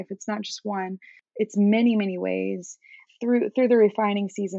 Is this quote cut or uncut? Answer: cut